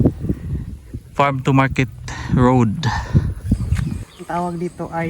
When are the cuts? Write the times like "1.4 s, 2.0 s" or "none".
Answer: 4.1 s